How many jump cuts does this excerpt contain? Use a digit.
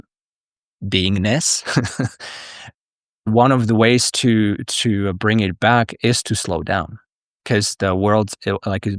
1